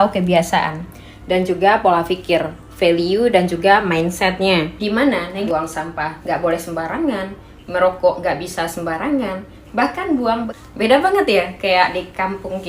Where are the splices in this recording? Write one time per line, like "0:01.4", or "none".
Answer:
0:05.4
0:10.5